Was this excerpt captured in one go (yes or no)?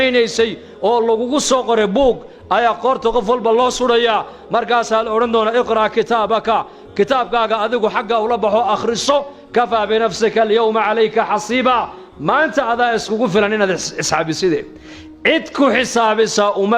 yes